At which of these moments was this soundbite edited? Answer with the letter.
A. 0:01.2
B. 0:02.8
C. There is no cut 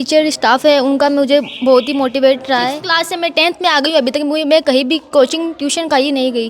B